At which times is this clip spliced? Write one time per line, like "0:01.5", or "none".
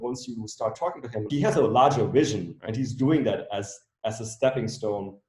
0:01.3